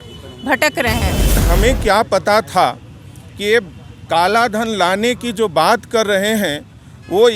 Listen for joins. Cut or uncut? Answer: cut